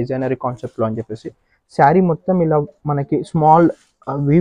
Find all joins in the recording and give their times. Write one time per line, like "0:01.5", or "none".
none